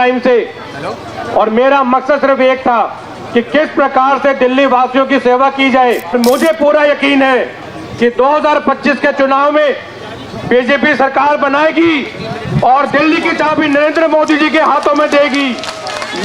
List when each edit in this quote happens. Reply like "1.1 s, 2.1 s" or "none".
6.1 s